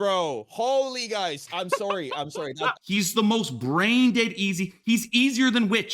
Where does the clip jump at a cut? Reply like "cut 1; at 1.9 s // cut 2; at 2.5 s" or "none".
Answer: cut 1; at 2.8 s

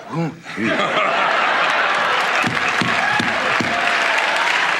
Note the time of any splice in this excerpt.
cut 1; at 2.3 s

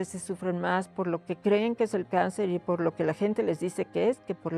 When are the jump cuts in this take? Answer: none

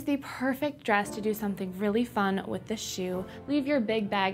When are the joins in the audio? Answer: cut 1; at 3.3 s

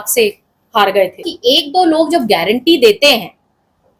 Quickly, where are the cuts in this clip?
cut 1; at 1.3 s

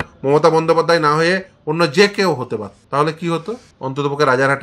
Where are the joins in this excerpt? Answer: cut 1; at 2.8 s // cut 2; at 3.7 s

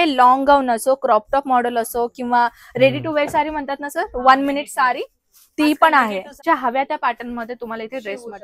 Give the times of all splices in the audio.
cut 1; at 6.4 s

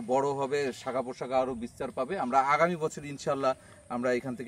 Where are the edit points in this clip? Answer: none

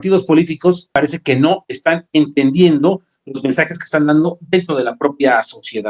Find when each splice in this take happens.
cut 1; at 0.9 s

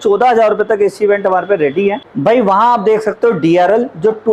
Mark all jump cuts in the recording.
none

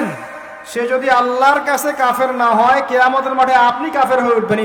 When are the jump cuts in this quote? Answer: none

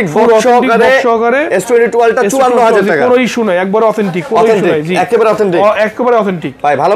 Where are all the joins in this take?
none

